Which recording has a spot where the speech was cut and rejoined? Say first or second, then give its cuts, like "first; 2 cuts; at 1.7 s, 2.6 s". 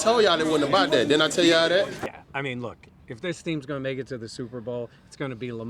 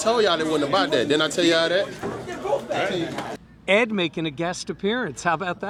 first; 1 cut; at 2.0 s